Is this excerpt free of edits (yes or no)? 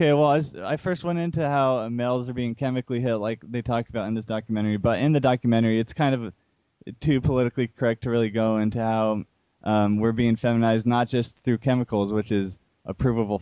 no